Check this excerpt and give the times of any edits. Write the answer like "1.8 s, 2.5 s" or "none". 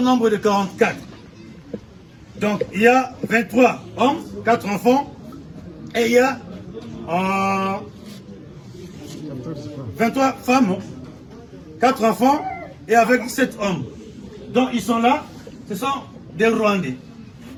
none